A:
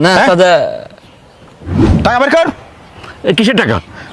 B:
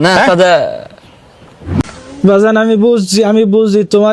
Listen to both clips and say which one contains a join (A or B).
B